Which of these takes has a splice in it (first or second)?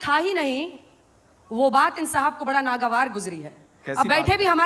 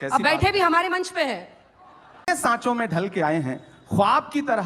second